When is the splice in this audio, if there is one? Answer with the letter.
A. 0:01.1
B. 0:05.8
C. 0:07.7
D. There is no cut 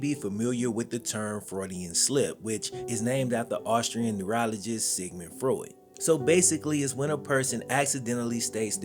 B